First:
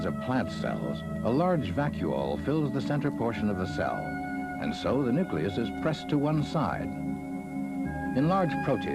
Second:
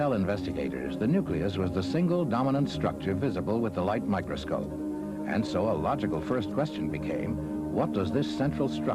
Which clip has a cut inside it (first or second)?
first